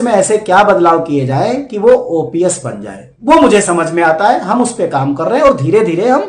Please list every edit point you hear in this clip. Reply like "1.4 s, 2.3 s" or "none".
none